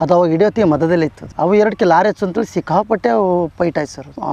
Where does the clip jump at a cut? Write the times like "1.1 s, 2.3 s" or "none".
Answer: 1.2 s